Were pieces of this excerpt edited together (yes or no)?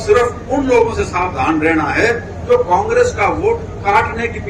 no